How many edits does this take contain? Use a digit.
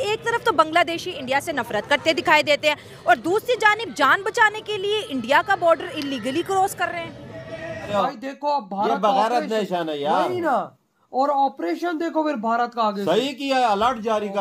1